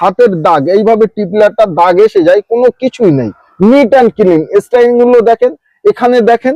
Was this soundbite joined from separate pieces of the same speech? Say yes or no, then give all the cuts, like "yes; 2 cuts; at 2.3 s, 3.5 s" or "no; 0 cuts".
no; 0 cuts